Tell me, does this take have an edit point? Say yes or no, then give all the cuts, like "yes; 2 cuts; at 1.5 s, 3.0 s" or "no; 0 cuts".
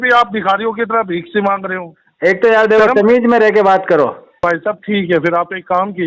yes; 1 cut; at 4.2 s